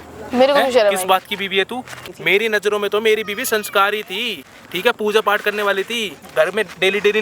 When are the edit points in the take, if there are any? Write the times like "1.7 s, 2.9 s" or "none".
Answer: 2.0 s, 6.3 s

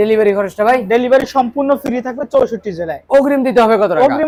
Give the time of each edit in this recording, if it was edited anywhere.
none

